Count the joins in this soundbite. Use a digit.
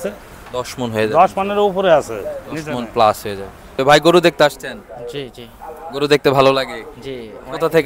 1